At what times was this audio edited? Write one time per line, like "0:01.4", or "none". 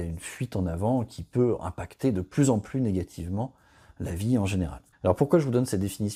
none

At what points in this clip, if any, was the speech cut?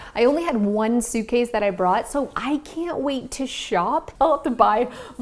0:04.1

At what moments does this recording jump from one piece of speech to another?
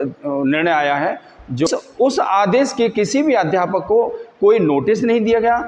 0:01.7

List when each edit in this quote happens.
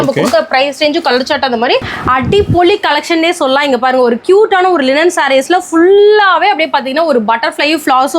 0:01.9

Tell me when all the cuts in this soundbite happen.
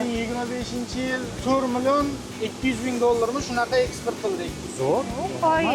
none

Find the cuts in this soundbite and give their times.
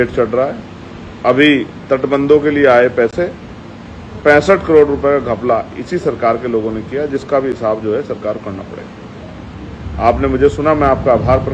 none

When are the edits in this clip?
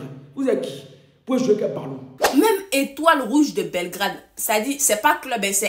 0:02.1

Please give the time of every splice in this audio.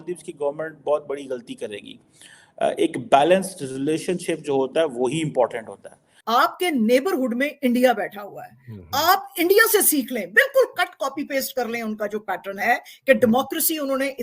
0:06.1

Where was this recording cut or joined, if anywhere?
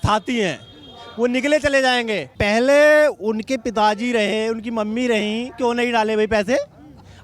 0:02.3

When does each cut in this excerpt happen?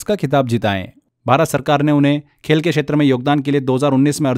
0:00.9

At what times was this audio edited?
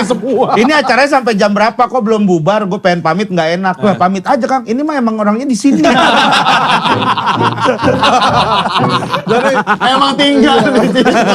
none

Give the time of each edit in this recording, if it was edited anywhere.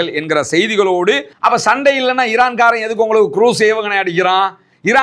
0:01.3

